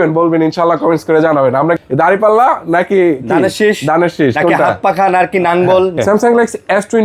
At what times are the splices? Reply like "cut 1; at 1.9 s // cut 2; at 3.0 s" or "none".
cut 1; at 1.8 s // cut 2; at 5.9 s